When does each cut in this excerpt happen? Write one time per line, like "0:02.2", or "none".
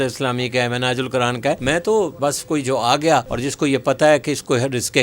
0:01.6
0:02.1
0:03.3